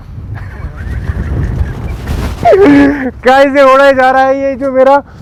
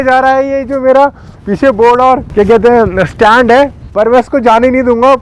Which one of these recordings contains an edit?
second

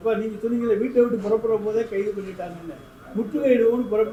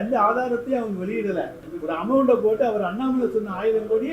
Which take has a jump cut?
second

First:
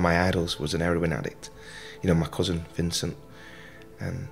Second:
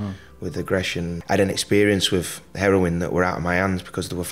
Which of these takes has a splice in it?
second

